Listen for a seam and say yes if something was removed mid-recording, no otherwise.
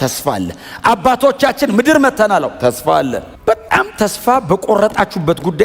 yes